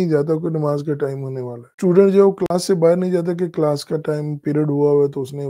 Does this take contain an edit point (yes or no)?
yes